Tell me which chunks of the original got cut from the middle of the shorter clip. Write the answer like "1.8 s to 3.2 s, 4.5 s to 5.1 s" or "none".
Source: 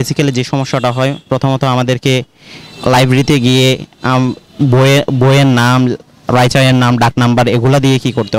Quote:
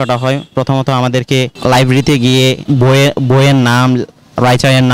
2.3 s to 2.7 s, 3.8 s to 4.5 s